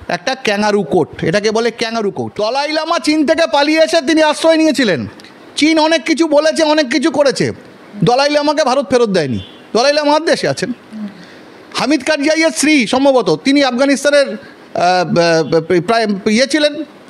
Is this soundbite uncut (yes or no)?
no